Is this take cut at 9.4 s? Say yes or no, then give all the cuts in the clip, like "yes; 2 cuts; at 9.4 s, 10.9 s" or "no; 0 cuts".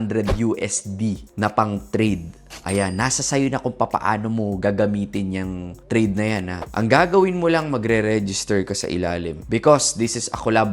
yes; 2 cuts; at 6.6 s, 9.4 s